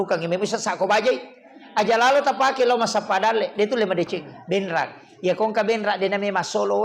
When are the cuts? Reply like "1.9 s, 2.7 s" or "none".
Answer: 4.3 s